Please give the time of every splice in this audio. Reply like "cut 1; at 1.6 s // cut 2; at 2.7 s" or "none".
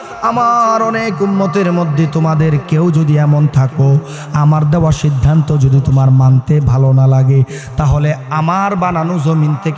none